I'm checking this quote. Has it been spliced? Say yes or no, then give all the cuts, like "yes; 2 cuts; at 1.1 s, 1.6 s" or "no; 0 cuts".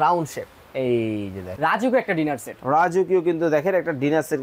yes; 1 cut; at 1.5 s